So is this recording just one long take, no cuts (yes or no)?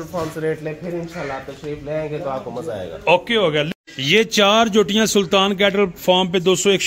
no